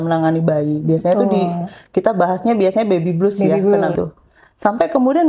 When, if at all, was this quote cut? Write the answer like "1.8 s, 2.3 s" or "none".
3.9 s